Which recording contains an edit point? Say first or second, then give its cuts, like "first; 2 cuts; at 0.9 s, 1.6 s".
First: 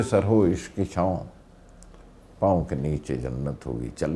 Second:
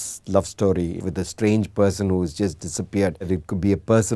second; 2 cuts; at 1.0 s, 3.3 s